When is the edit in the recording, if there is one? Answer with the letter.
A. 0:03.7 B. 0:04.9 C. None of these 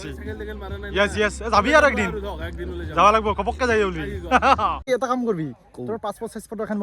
B